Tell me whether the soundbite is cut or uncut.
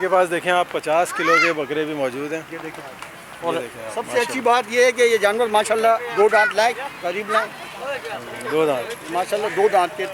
uncut